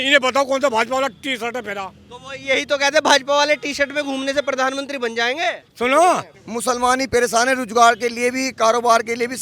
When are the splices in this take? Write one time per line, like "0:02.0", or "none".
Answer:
0:06.3